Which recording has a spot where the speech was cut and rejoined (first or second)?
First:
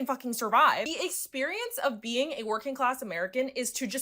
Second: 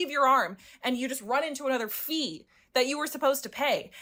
first